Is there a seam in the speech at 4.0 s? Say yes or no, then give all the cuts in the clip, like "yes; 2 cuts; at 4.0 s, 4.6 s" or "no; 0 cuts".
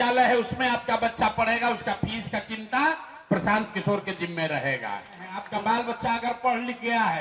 no; 1 cut; at 5.4 s